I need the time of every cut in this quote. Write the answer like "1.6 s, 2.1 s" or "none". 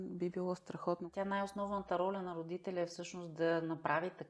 1.1 s